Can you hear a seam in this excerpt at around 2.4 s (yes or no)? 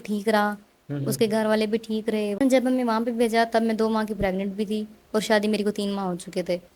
yes